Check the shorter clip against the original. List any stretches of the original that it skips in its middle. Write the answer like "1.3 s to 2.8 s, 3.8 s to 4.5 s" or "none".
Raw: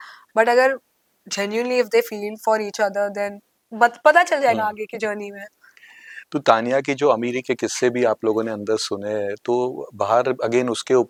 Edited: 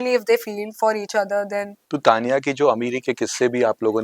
3.4 s to 6.2 s